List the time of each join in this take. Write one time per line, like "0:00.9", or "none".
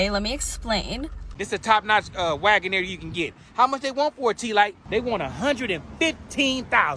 0:01.2
0:04.8